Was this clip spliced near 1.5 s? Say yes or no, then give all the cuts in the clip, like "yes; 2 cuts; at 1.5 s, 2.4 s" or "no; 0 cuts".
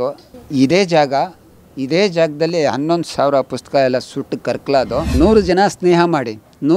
no; 1 cut; at 5.0 s